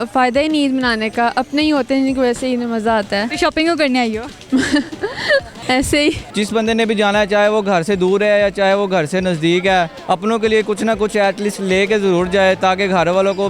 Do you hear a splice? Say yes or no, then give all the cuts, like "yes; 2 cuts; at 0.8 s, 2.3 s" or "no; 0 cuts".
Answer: yes; 4 cuts; at 3.3 s, 5.5 s, 6.2 s, 10.0 s